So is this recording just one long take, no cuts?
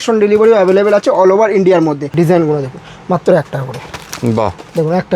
no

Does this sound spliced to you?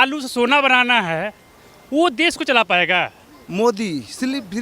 yes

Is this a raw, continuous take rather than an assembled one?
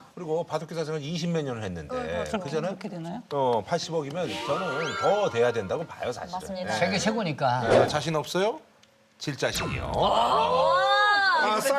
no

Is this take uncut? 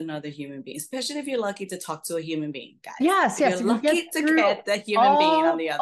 yes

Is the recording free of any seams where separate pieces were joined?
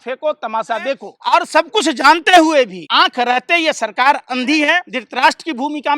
no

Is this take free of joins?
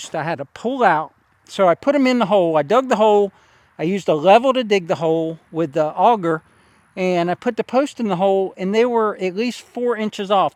yes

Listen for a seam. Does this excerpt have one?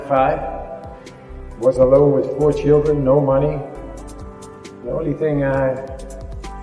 no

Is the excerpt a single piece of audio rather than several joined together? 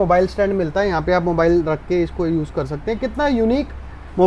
yes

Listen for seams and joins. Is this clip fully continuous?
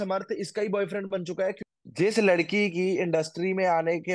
no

